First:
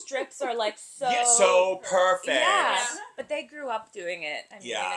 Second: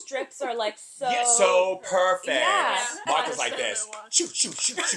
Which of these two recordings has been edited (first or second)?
second